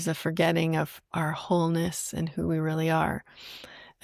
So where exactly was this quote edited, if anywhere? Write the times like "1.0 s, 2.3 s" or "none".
1.0 s